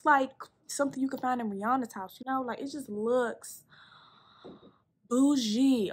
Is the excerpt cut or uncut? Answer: uncut